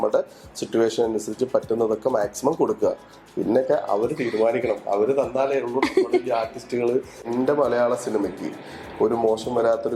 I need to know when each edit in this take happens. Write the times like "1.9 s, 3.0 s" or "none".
7.3 s